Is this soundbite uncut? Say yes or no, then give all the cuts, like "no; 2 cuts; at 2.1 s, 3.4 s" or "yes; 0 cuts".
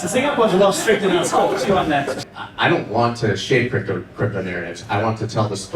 no; 1 cut; at 2.2 s